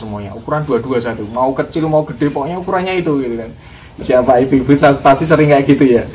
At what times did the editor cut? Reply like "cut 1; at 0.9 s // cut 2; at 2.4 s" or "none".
cut 1; at 4.0 s